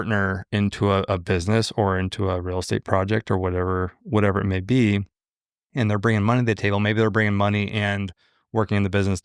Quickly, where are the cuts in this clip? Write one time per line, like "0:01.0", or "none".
none